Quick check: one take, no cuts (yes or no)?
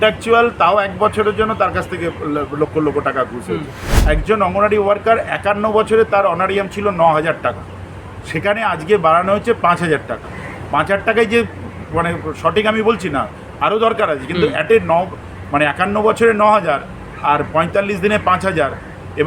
no